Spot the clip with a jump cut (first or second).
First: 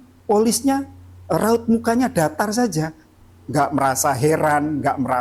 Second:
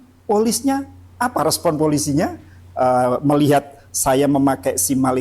second